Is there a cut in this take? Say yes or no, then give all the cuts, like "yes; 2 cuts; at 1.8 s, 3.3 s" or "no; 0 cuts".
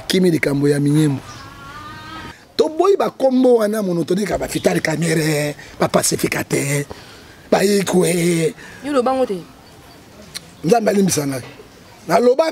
yes; 1 cut; at 2.4 s